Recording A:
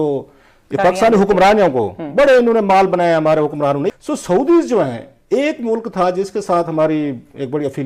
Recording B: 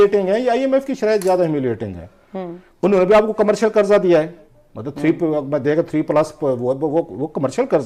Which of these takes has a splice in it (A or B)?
A